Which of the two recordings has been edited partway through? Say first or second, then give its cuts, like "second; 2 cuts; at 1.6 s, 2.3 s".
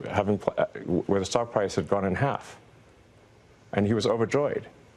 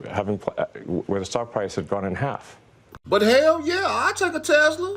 second; 1 cut; at 2.9 s